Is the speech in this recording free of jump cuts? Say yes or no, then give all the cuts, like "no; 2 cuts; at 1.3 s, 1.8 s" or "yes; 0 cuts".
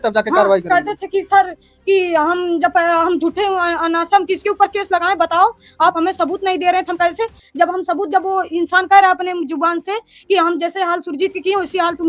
yes; 0 cuts